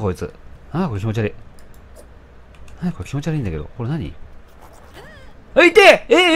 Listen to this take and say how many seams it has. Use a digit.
0